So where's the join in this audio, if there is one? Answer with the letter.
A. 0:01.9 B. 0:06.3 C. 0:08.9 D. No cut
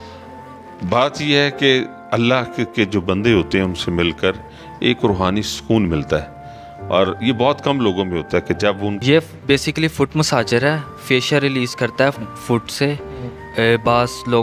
C